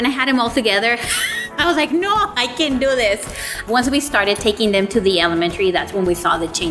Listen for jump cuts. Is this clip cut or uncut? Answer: uncut